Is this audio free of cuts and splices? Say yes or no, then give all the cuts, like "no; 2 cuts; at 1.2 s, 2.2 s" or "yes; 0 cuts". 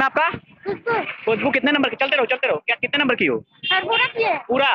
yes; 0 cuts